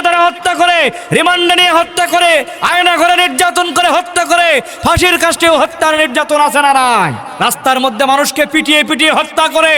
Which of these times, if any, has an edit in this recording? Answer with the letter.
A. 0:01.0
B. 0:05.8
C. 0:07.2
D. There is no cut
C